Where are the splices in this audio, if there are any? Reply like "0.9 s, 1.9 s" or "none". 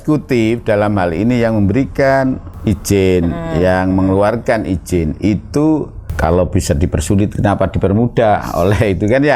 2.5 s, 6.0 s